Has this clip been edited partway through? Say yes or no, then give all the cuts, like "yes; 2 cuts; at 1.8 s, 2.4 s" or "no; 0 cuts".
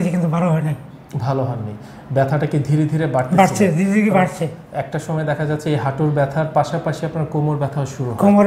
no; 0 cuts